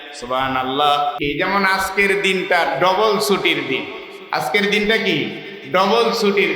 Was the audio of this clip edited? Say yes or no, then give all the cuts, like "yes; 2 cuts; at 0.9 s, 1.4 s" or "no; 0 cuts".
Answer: yes; 1 cut; at 1.2 s